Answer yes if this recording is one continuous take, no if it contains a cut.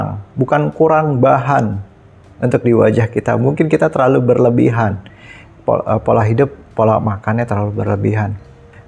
yes